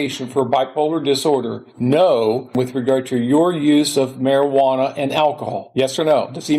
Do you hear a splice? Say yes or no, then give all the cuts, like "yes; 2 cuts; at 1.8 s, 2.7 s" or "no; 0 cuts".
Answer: yes; 3 cuts; at 1.6 s, 2.5 s, 5.6 s